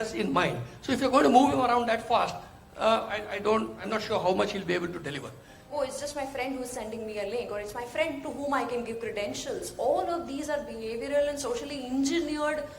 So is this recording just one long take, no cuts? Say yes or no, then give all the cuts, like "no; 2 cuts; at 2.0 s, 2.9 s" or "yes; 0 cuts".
no; 1 cut; at 5.7 s